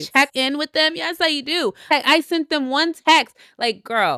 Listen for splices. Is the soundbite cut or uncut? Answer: uncut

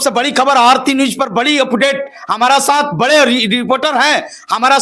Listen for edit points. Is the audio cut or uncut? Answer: uncut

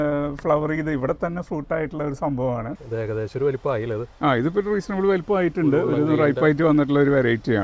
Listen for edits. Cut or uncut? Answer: cut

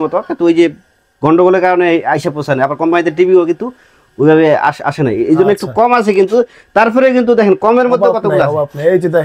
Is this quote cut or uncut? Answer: uncut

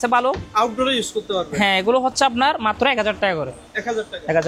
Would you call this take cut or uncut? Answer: uncut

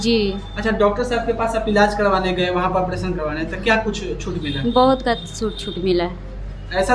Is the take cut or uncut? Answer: uncut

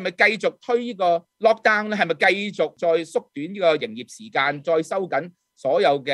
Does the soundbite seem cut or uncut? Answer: cut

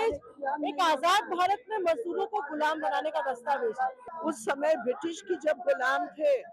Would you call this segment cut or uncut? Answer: cut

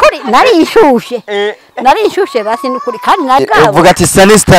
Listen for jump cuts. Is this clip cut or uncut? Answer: cut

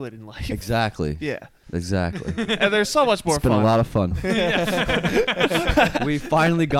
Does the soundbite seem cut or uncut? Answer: cut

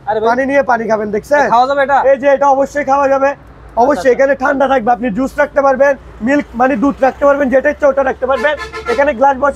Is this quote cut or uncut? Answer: uncut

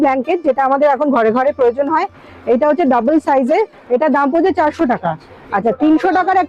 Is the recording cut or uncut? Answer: uncut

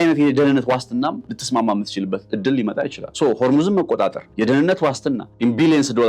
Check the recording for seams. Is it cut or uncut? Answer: cut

